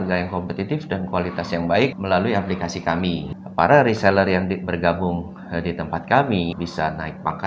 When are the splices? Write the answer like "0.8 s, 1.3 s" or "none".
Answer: 2.0 s, 3.3 s, 6.5 s